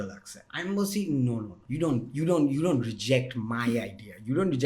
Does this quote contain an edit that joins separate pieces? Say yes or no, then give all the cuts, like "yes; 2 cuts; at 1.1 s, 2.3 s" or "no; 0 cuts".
yes; 1 cut; at 1.6 s